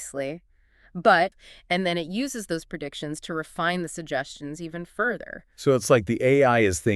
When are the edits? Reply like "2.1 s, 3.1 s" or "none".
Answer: 1.4 s

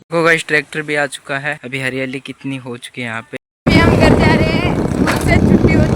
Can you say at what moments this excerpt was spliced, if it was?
1.6 s, 3.3 s

